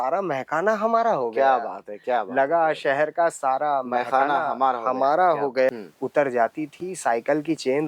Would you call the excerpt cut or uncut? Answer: cut